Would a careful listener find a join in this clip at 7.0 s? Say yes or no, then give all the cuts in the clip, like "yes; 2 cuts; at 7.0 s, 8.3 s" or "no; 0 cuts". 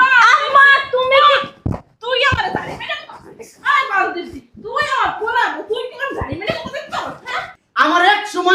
yes; 1 cut; at 7.0 s